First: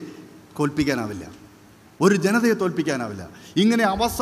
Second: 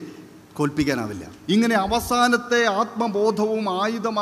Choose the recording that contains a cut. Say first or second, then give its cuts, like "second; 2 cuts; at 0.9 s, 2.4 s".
second; 1 cut; at 1.5 s